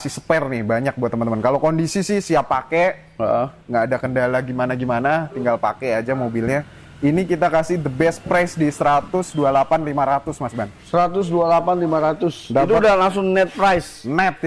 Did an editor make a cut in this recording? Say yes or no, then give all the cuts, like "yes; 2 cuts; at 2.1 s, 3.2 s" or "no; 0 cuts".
no; 0 cuts